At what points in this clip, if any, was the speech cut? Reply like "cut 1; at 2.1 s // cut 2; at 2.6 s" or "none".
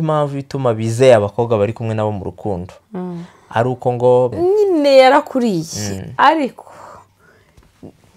cut 1; at 4.3 s